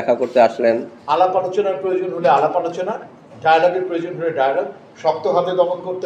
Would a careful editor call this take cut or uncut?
cut